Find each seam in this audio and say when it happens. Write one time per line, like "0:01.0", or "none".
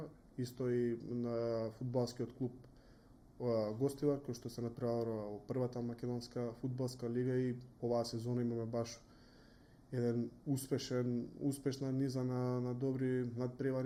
none